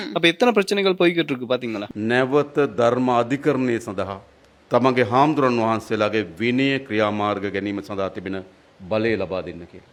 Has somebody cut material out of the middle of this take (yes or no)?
no